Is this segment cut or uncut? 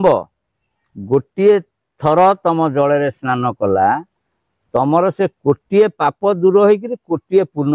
uncut